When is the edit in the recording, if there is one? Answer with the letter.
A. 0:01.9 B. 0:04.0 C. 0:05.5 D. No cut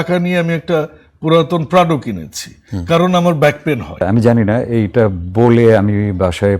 B